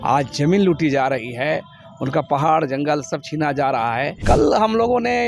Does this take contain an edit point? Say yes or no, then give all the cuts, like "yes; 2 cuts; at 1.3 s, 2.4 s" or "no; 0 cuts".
yes; 1 cut; at 4.2 s